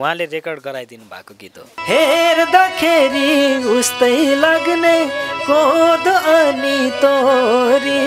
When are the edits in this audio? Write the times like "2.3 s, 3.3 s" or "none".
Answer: 1.7 s